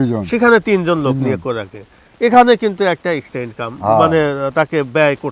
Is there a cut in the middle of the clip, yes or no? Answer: no